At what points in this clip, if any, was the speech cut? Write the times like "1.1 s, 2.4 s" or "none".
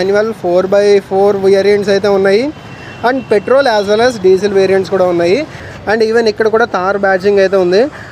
5.6 s

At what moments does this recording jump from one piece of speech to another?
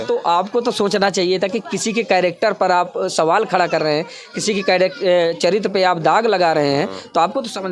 none

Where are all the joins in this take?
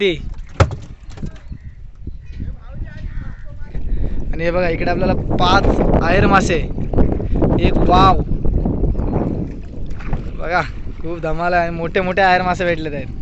3.9 s

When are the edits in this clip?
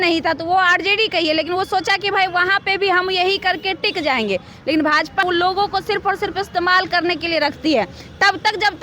5.2 s

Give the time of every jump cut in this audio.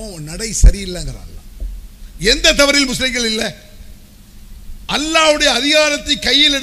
none

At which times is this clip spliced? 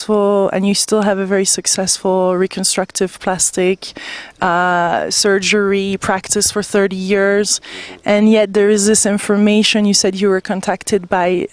9.0 s

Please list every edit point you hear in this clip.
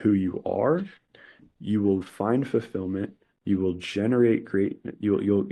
none

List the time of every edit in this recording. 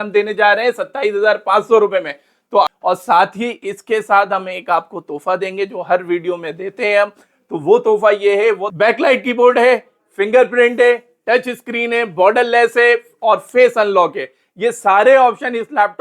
2.7 s, 8.7 s

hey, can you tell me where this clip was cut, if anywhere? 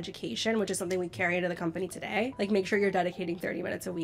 2.3 s

